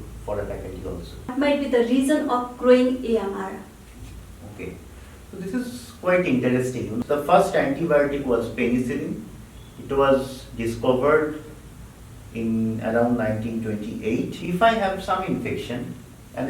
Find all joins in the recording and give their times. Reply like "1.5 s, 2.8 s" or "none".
1.3 s, 7.0 s, 14.4 s